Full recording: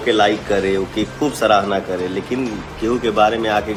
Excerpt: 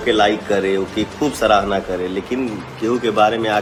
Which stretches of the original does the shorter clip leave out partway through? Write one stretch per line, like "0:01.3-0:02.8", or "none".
none